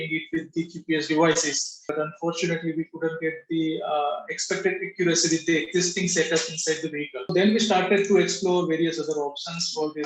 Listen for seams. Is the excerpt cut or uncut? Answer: cut